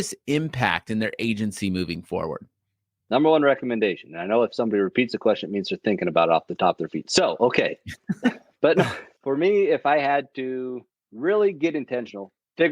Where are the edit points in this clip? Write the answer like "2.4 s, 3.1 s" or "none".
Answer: 9.1 s

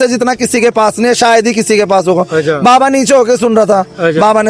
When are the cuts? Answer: none

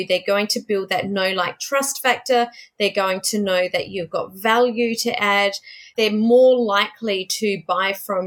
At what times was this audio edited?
none

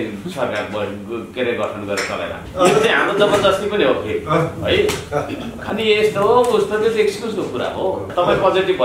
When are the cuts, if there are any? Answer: 2.4 s, 5.6 s, 8.1 s

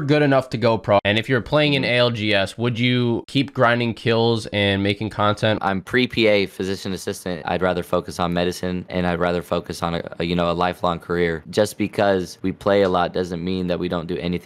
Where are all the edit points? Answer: 1.0 s, 5.6 s, 7.4 s, 11.4 s, 12.4 s

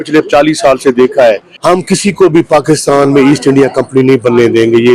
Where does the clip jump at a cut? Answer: 1.5 s

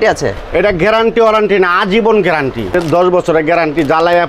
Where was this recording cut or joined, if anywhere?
2.8 s

